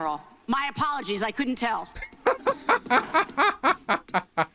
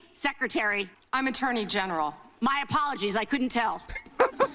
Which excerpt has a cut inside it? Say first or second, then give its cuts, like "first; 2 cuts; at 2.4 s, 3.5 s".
second; 1 cut; at 1.0 s